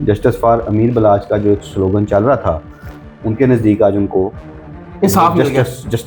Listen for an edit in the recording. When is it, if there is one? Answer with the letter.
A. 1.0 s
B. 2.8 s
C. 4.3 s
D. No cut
D